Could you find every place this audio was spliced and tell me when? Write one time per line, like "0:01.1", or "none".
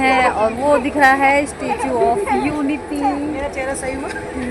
none